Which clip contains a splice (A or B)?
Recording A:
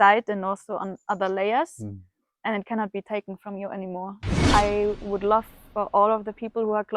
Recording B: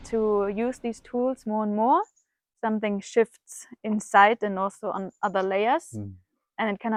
A